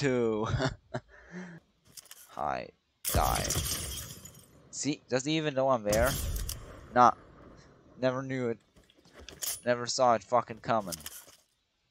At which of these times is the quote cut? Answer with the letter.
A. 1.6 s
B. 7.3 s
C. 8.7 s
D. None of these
A